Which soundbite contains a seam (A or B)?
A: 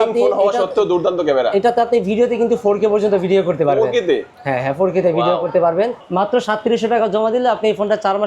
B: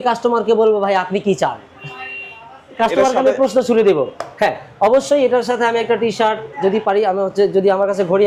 A